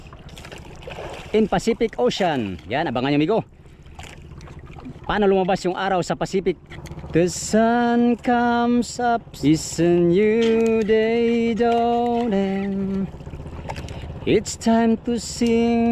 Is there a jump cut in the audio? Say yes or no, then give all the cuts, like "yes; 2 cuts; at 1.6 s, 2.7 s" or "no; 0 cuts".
yes; 2 cuts; at 6.7 s, 9.3 s